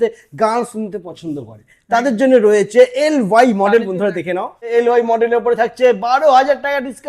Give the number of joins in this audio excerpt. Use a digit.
1